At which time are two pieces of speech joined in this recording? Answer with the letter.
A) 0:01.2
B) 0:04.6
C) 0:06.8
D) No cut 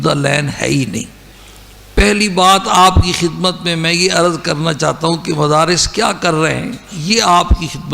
A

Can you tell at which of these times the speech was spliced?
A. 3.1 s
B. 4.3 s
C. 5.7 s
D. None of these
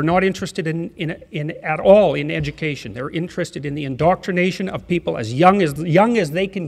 C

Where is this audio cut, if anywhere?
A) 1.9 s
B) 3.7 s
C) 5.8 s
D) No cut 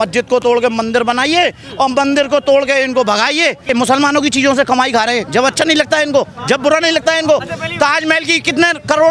B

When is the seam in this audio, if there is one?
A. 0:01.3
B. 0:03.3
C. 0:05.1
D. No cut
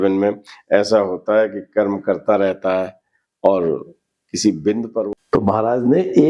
C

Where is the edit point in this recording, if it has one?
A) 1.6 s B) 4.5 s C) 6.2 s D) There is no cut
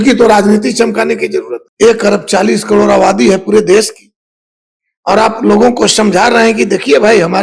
A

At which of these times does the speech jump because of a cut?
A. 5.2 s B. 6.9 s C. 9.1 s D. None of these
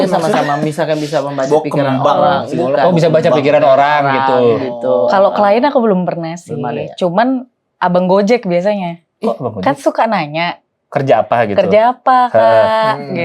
D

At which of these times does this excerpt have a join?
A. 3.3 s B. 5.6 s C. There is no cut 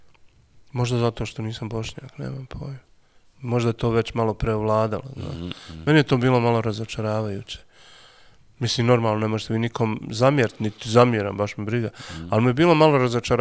C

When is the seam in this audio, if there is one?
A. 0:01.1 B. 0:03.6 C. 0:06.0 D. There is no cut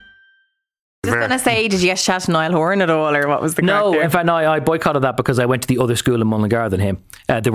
A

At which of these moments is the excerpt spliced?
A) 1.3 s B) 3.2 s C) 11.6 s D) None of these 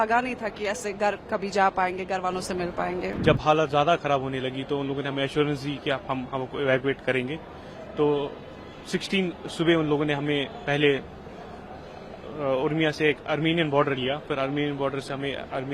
B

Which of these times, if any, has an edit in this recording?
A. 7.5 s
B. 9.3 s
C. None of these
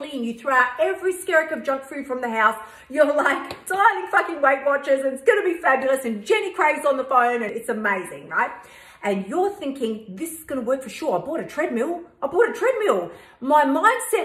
A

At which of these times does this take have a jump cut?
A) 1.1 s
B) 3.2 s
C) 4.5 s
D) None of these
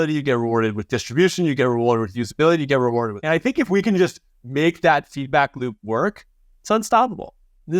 B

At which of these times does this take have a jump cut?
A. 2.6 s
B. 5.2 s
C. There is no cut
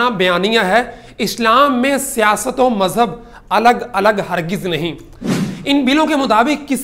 B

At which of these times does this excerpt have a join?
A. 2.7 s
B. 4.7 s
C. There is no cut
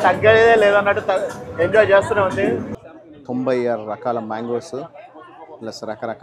A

